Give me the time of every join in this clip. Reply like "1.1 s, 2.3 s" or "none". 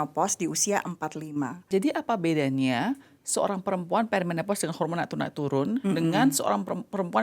1.7 s

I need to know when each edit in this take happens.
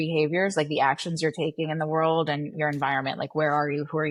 none

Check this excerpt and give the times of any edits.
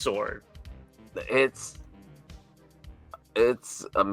1.5 s, 3.0 s

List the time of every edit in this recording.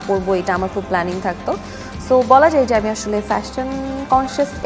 1.8 s

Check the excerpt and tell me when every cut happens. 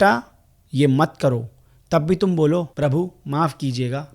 2.7 s

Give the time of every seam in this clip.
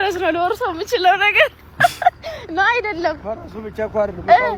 none

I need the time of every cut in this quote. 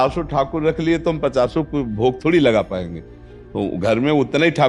none

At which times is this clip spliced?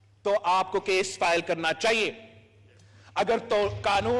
none

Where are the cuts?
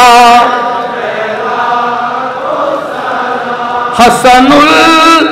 none

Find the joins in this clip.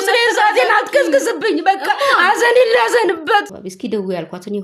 3.6 s

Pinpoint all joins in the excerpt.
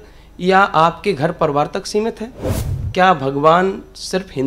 none

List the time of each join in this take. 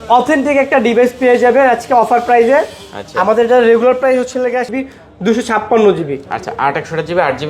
4.7 s

